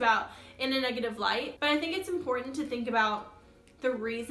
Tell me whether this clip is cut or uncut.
uncut